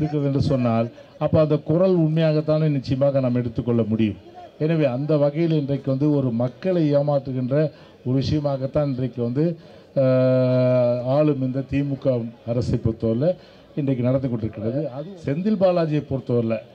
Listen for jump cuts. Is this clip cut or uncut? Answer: cut